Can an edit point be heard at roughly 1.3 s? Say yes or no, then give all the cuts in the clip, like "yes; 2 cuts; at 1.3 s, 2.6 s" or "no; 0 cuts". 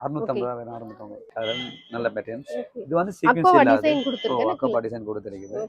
yes; 1 cut; at 1.3 s